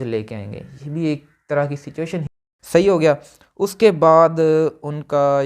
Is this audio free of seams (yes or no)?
no